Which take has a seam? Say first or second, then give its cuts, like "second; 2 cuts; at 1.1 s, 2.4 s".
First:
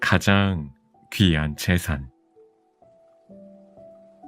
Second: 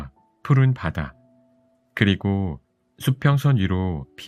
first; 1 cut; at 2.3 s